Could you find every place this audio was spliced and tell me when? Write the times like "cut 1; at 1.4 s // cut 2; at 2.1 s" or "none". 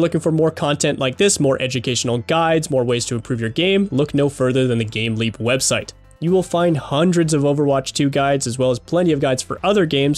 none

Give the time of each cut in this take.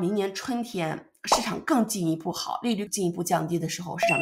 cut 1; at 2.9 s

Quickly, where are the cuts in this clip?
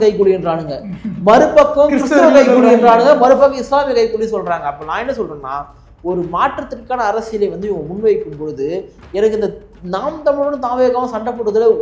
none

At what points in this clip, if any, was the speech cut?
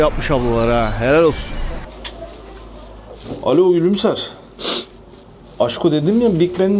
cut 1; at 1.8 s

